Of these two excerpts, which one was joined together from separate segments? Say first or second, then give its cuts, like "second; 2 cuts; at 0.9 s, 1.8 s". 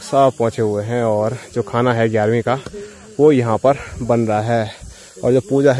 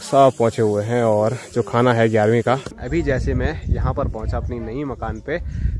second; 1 cut; at 2.8 s